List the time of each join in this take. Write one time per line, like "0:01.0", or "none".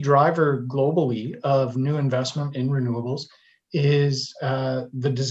none